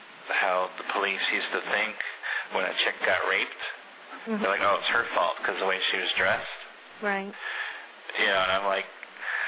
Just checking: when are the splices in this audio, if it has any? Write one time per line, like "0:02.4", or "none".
none